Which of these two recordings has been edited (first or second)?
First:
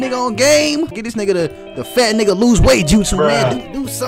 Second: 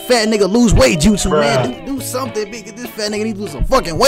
first